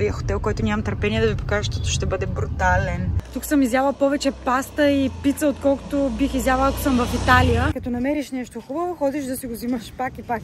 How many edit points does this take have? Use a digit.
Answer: 2